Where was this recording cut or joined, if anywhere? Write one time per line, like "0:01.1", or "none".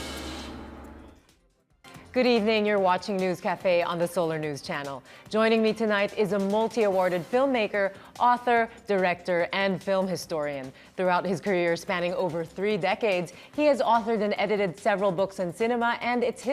0:01.0